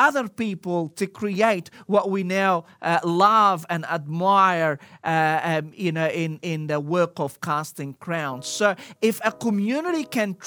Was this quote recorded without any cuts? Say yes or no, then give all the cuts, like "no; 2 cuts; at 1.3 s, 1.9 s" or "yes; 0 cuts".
yes; 0 cuts